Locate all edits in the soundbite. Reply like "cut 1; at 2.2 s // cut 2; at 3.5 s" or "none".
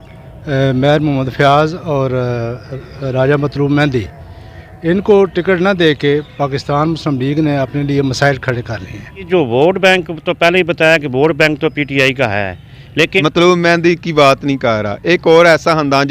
cut 1; at 9.3 s // cut 2; at 13.2 s